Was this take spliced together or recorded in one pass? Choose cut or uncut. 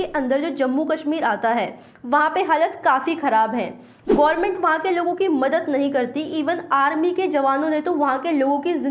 uncut